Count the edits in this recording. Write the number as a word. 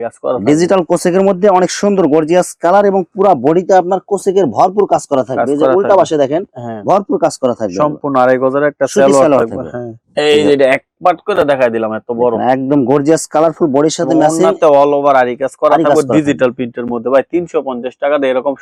zero